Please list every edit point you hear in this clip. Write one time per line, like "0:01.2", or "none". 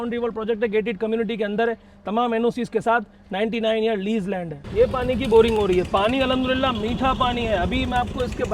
0:04.6

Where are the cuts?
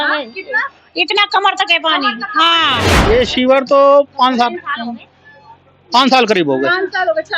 0:02.9

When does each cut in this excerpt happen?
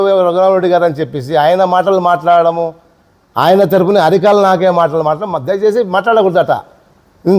none

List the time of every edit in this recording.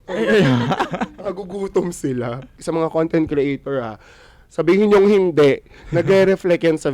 0:02.5

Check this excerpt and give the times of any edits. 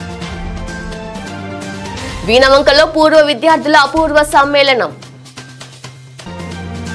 none

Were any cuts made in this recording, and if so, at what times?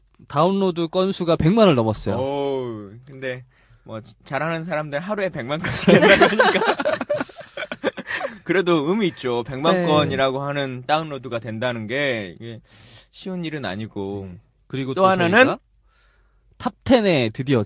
0:09.6

